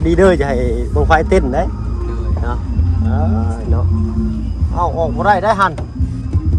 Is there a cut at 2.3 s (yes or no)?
no